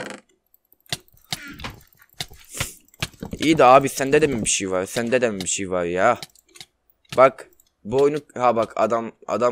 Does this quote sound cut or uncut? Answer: uncut